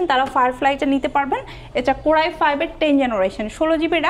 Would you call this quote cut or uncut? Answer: uncut